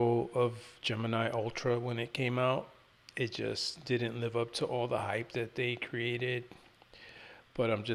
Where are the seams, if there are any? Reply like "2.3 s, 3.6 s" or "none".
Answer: none